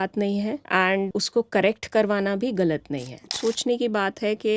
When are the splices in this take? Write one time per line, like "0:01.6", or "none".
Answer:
0:01.1
0:03.3